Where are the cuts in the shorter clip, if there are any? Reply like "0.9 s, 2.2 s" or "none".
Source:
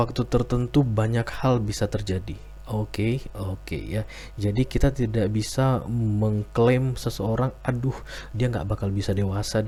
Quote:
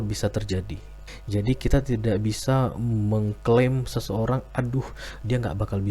1.0 s